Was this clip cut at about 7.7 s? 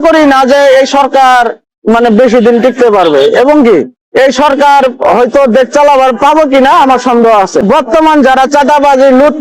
yes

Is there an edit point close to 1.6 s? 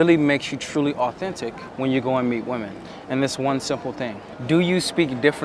yes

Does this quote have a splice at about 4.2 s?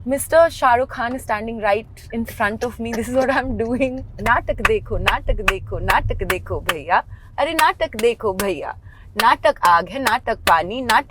yes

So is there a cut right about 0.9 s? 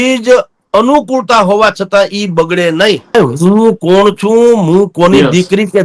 no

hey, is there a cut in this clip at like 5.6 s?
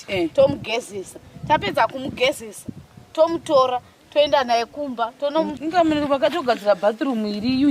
yes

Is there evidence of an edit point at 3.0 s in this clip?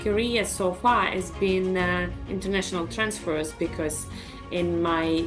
no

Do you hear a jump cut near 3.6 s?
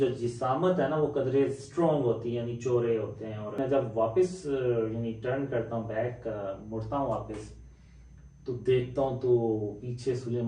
yes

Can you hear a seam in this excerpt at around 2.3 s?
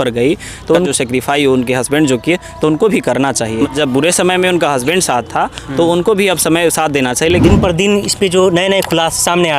no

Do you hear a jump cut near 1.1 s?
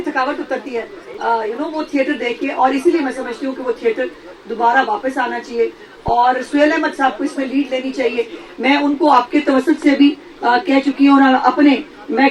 no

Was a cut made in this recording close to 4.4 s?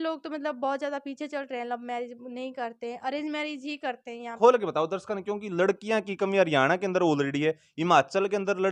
yes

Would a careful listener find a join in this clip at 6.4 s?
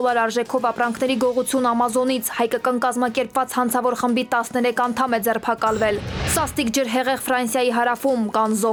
no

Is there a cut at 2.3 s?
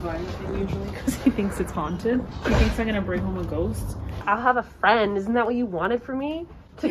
yes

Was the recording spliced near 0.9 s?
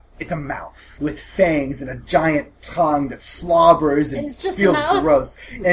yes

